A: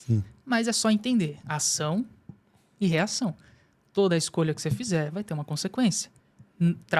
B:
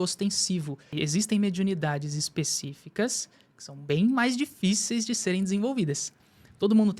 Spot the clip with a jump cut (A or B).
B